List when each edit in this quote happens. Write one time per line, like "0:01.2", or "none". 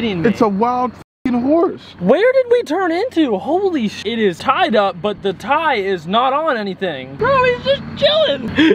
none